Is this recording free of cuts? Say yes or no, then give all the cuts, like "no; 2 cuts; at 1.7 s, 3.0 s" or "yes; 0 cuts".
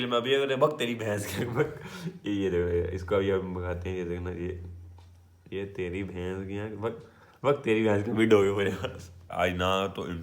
no; 1 cut; at 9.3 s